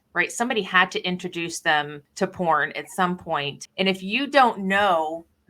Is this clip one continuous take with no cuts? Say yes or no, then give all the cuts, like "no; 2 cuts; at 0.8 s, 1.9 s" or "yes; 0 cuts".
no; 2 cuts; at 2.0 s, 3.6 s